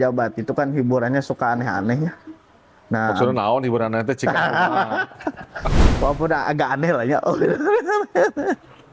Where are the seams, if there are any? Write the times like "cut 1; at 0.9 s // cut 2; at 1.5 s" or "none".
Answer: cut 1; at 5.8 s